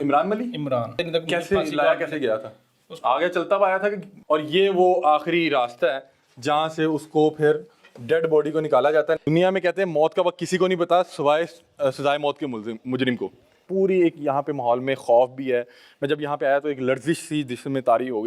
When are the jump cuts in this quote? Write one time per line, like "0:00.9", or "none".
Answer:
0:01.0
0:04.1
0:09.2
0:13.6